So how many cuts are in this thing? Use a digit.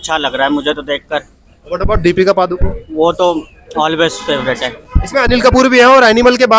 0